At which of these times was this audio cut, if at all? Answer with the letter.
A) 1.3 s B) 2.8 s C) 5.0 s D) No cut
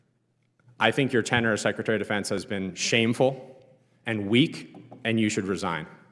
D